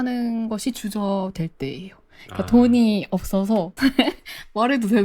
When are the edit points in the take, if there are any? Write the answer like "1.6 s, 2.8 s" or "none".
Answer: 3.7 s